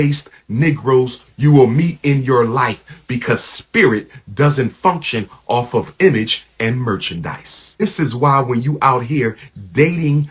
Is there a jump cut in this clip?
yes; 1 cut; at 7.8 s

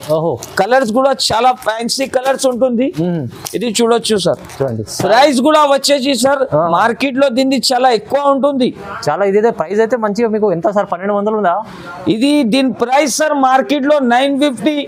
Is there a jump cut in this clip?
no; 0 cuts

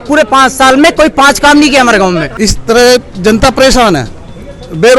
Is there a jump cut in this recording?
yes; 1 cut; at 2.3 s

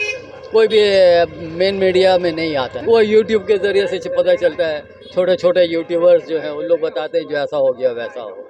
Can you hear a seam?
no; 0 cuts

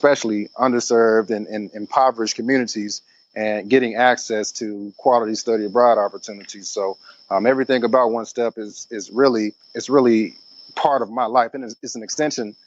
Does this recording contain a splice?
yes; 1 cut; at 9.7 s

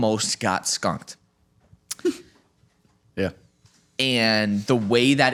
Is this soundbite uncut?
yes; 0 cuts

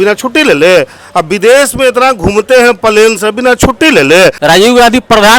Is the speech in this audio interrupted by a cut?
yes; 1 cut; at 4.4 s

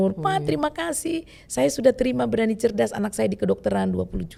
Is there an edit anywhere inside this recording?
no; 0 cuts

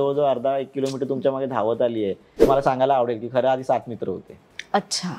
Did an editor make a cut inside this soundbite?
yes; 1 cut; at 2.5 s

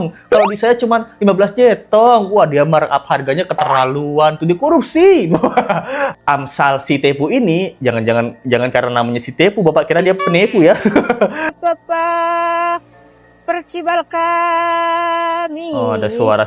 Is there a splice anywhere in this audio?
yes; 2 cuts; at 6.1 s, 11.5 s

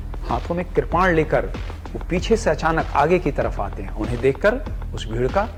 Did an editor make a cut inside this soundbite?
no; 0 cuts

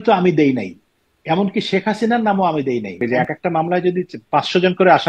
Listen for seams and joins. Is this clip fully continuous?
no; 1 cut; at 3.0 s

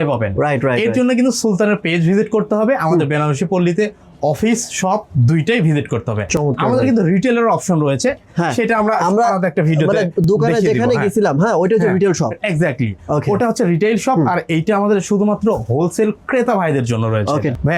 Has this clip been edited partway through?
no; 0 cuts

